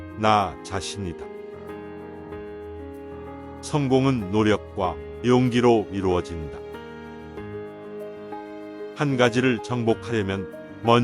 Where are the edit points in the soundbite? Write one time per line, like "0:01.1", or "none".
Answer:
0:01.7
0:03.7
0:06.9
0:08.9